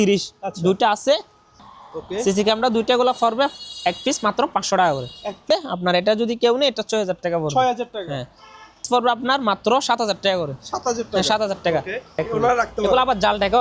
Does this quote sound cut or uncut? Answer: cut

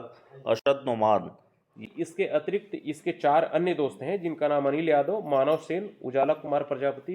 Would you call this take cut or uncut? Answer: cut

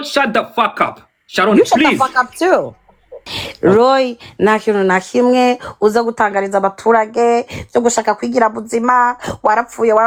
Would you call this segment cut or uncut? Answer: uncut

